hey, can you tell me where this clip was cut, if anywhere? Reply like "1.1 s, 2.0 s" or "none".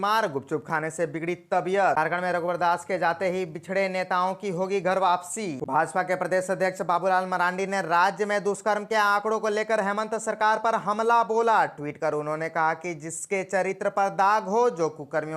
1.9 s, 5.6 s

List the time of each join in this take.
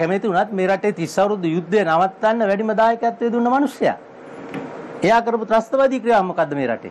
none

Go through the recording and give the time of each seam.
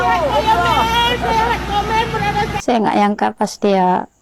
2.5 s

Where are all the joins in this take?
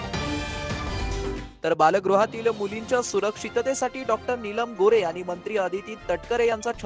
none

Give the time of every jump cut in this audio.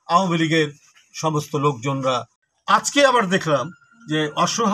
2.3 s

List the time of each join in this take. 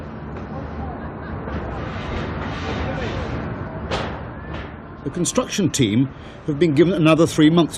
none

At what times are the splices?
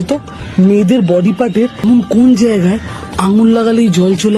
1.8 s

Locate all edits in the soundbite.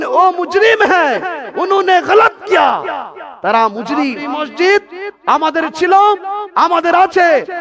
4.2 s

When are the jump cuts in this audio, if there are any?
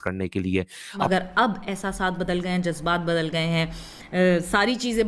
1.1 s

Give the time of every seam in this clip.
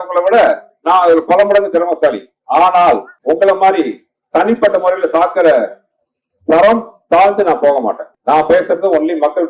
none

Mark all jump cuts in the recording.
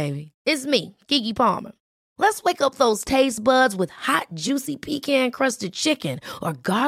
none

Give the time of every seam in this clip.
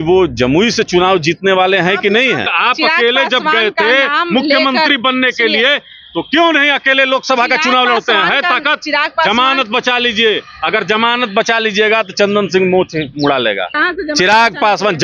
2.5 s, 13.7 s

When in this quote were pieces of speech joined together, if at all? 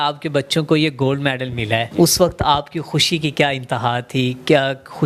1.9 s

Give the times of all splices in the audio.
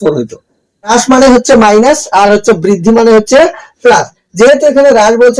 0.9 s

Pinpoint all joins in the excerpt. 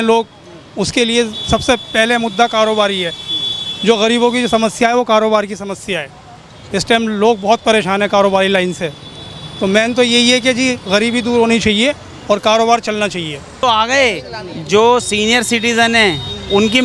13.5 s

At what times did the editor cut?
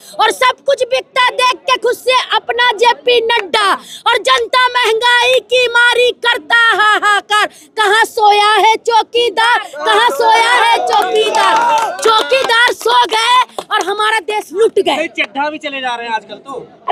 none

